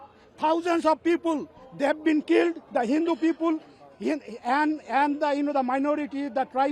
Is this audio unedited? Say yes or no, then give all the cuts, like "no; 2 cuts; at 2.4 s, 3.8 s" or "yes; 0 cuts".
yes; 0 cuts